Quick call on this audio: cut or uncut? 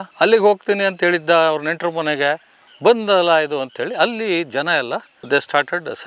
uncut